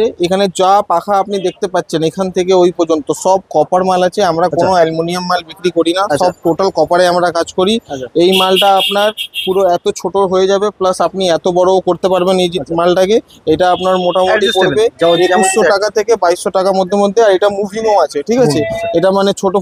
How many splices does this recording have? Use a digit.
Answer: 0